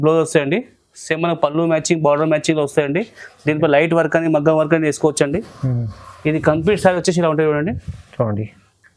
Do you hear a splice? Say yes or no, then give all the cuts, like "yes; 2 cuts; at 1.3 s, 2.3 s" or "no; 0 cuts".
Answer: no; 0 cuts